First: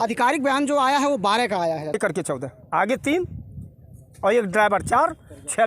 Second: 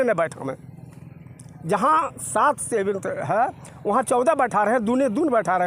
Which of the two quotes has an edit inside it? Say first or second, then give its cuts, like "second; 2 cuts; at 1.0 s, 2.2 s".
first; 1 cut; at 2.0 s